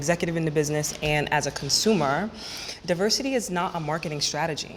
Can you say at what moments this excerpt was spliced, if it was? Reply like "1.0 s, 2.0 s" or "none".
none